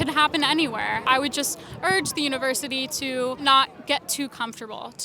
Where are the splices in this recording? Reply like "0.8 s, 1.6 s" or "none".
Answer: 1.1 s, 3.4 s